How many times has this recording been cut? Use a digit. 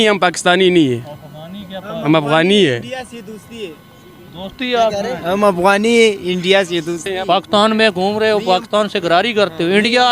1